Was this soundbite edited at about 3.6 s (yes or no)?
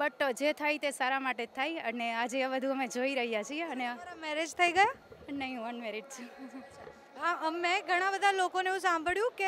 no